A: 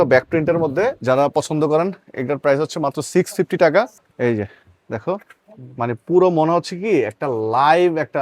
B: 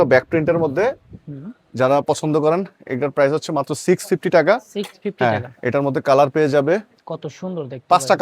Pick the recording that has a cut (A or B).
A